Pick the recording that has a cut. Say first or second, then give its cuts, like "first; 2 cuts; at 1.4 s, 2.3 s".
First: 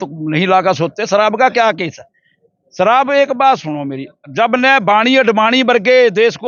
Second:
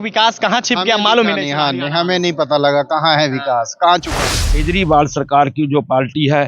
second; 1 cut; at 4.2 s